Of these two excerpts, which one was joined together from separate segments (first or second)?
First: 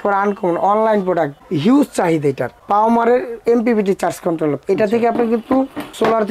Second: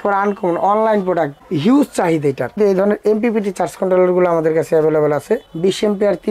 second